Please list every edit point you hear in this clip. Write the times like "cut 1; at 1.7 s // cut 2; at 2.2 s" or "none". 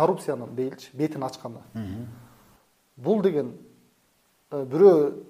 none